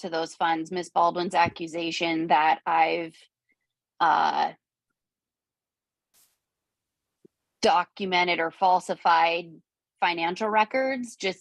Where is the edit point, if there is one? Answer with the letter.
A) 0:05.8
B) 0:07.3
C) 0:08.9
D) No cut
D